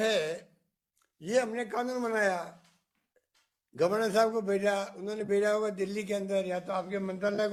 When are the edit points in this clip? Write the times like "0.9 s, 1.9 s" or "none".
none

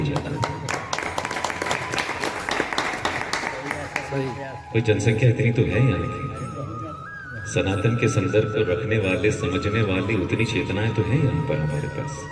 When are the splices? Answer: none

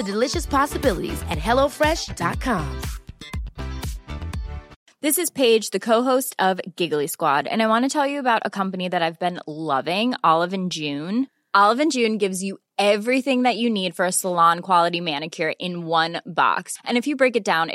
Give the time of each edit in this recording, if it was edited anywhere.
4.8 s

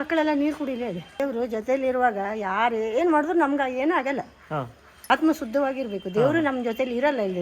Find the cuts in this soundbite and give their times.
1.2 s, 4.9 s

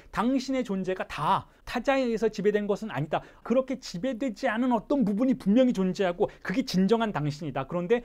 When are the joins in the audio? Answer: 1.6 s, 3.4 s

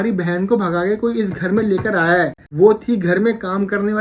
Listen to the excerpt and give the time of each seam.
2.4 s

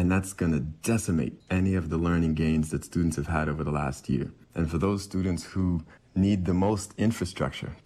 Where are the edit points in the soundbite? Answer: 1.4 s, 4.4 s, 6.0 s

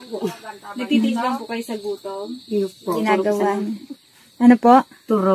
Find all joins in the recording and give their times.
none

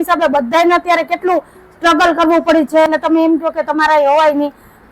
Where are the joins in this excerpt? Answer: 2.9 s

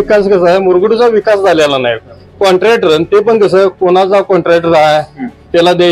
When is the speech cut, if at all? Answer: none

